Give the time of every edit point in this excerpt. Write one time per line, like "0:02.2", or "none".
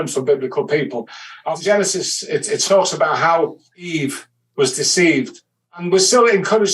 0:01.5
0:03.9
0:05.7